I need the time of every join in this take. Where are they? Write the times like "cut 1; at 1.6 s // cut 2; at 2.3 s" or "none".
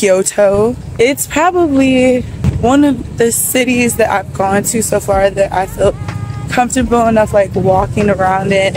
cut 1; at 0.8 s // cut 2; at 2.4 s